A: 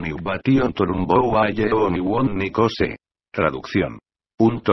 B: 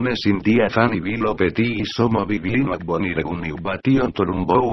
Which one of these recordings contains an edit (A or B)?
A